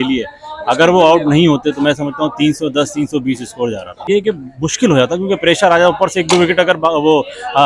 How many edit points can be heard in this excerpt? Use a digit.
0